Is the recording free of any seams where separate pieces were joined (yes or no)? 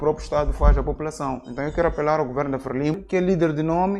no